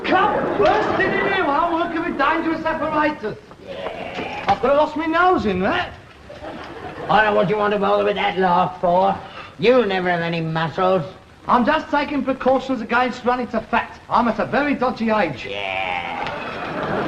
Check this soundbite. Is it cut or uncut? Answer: cut